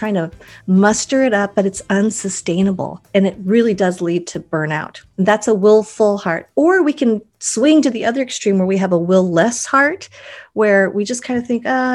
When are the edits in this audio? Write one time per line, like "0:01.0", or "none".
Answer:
0:02.9
0:05.0